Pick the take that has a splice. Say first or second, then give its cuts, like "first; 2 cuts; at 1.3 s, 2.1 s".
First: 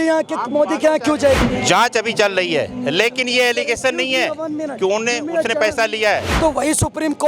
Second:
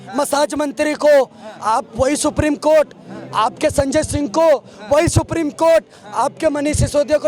first; 2 cuts; at 1.4 s, 6.3 s